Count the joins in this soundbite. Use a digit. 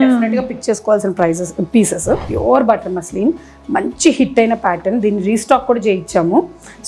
1